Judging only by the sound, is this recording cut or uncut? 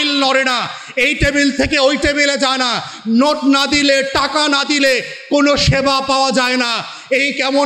uncut